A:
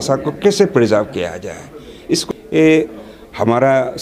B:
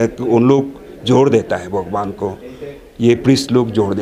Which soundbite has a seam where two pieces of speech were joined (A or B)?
A